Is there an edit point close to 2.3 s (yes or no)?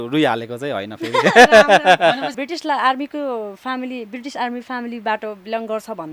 yes